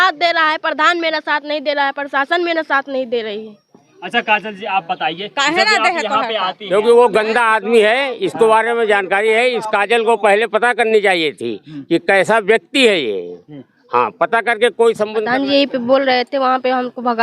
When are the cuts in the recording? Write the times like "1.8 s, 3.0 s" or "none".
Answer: 6.7 s, 15.2 s